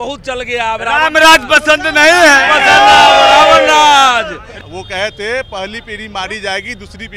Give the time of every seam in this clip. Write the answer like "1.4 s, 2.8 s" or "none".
4.5 s